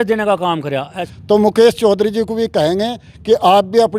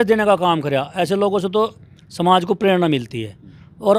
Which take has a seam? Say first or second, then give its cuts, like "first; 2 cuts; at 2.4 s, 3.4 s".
first; 1 cut; at 1.0 s